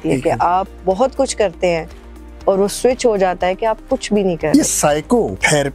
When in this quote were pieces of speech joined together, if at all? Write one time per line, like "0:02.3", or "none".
0:04.5